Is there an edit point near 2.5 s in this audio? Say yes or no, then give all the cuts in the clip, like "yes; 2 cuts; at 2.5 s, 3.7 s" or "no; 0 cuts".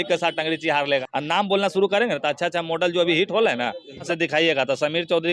no; 2 cuts; at 1.1 s, 4.1 s